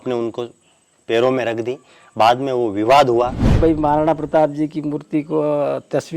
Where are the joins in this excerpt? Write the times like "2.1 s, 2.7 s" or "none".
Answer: 3.6 s